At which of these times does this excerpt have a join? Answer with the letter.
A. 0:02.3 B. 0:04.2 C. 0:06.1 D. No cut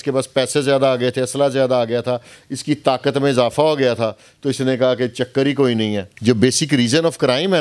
C